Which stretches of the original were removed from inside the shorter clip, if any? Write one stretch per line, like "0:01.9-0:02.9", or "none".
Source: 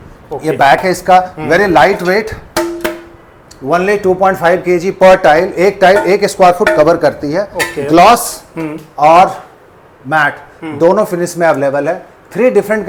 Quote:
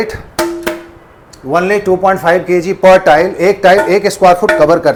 none